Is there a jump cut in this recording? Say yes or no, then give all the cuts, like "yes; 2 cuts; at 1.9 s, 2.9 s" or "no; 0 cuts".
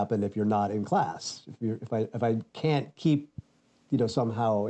no; 0 cuts